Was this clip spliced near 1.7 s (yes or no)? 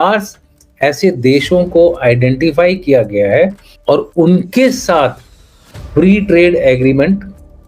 no